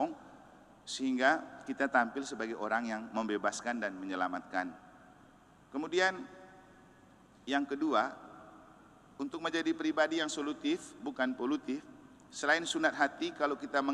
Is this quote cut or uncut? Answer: uncut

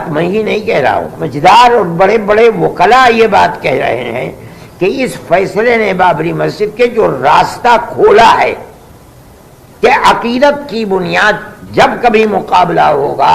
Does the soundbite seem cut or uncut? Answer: cut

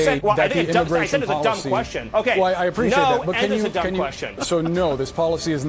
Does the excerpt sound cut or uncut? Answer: uncut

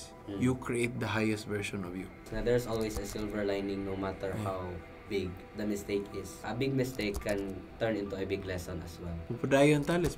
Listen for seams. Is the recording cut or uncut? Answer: cut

